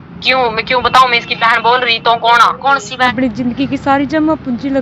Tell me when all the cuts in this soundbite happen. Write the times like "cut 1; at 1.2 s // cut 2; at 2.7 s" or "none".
cut 1; at 3.0 s